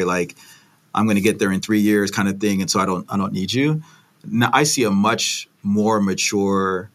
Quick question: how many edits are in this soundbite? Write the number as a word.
zero